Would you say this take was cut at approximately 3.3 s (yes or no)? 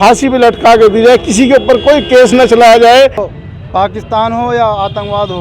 yes